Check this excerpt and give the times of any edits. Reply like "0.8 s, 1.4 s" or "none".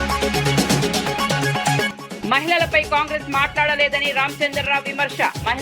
1.9 s

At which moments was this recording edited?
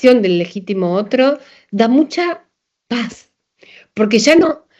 none

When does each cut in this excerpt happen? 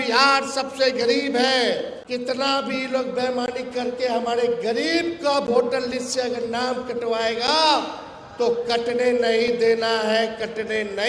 2.0 s

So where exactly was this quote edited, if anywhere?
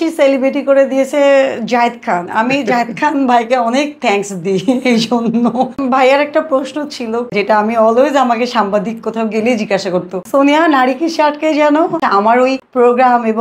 5.8 s, 7.3 s, 10.2 s, 12.2 s

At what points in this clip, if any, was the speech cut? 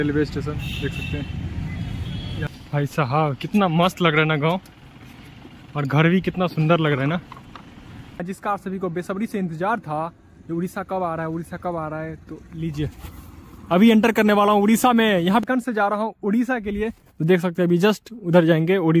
2.5 s, 8.2 s, 15.4 s

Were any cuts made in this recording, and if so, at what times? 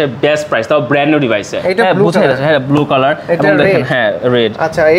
1.5 s

